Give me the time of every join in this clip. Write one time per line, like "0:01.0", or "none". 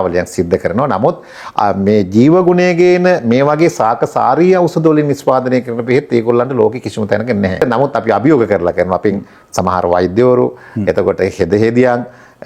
0:07.6